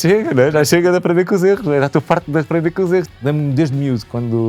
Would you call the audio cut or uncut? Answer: cut